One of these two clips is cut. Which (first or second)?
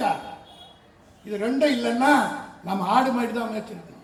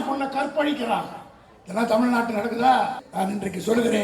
second